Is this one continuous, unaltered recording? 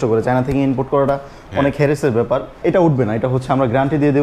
no; 1 cut; at 2.6 s

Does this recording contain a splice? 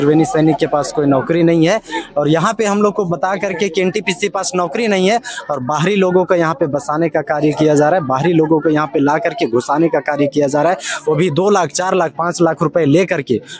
no; 0 cuts

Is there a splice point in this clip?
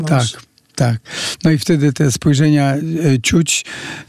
no; 0 cuts

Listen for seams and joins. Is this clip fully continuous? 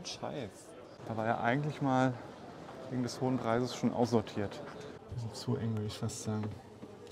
no; 2 cuts; at 0.9 s, 5.0 s

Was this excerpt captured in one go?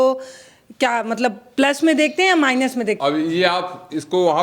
no; 1 cut; at 3.0 s

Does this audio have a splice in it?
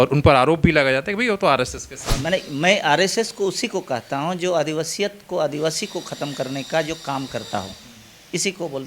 yes; 1 cut; at 2.2 s

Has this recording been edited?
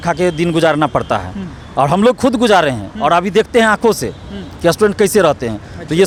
no; 0 cuts

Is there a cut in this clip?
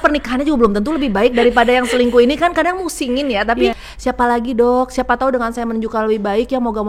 yes; 1 cut; at 3.9 s

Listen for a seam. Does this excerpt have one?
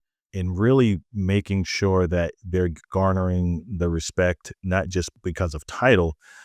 yes; 1 cut; at 5.1 s

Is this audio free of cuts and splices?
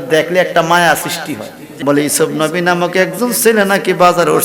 no; 1 cut; at 1.7 s

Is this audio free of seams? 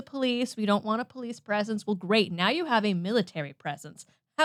yes; 0 cuts

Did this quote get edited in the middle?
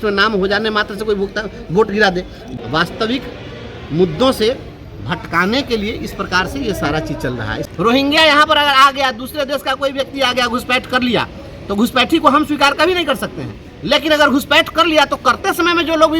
yes; 2 cuts; at 2.4 s, 7.6 s

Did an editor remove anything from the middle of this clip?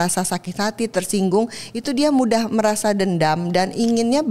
no; 0 cuts

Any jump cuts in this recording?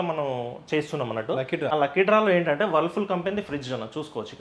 yes; 1 cut; at 1.7 s

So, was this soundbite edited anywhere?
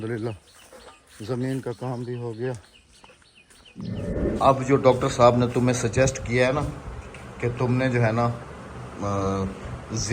yes; 1 cut; at 4.1 s

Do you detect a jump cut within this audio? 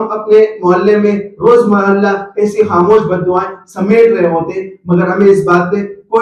no; 0 cuts

